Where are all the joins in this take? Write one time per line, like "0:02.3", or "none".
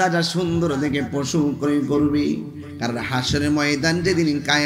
none